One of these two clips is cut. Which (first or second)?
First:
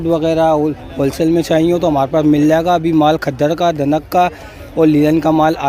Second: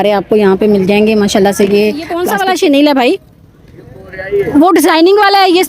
second